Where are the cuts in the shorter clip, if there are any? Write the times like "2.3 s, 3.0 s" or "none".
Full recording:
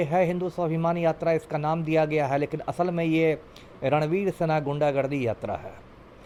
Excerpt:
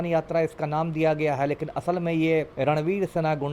2.5 s